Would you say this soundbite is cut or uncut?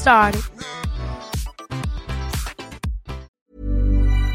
cut